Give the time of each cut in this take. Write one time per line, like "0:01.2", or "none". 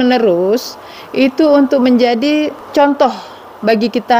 0:02.6

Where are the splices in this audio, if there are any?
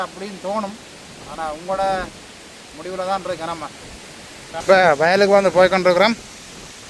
0:04.6

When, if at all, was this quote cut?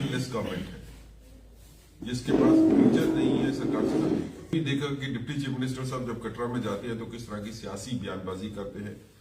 0:04.5

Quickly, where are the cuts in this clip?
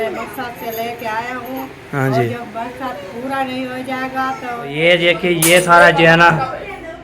0:04.6

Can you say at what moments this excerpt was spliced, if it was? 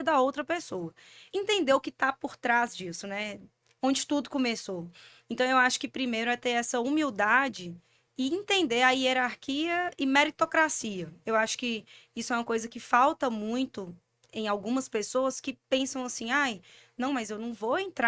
0:01.3

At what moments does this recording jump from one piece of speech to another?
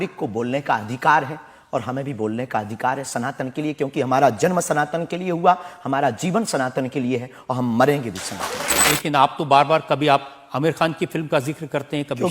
0:08.9

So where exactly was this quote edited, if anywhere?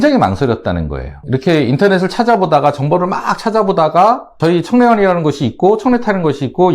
0:01.2
0:04.4

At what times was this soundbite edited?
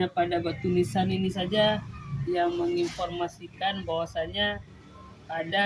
none

